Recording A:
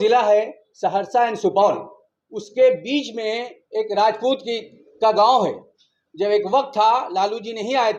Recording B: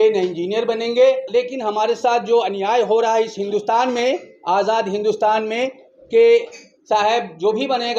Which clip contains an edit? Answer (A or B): B